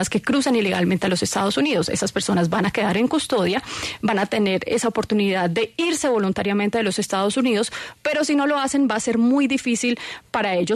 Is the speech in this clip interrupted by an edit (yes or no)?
no